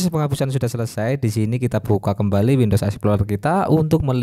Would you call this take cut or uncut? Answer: uncut